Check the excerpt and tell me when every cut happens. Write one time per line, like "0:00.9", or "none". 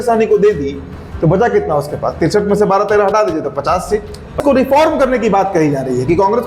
0:04.4